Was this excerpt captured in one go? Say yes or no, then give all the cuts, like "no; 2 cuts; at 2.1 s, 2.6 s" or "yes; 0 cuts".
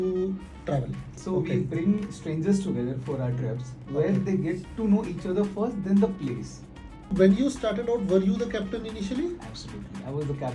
no; 2 cuts; at 1.1 s, 7.1 s